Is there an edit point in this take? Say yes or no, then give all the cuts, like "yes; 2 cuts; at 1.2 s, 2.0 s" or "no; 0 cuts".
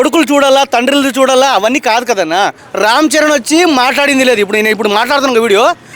yes; 1 cut; at 2.6 s